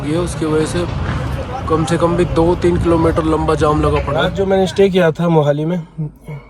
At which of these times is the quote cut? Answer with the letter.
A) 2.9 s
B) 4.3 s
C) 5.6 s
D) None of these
B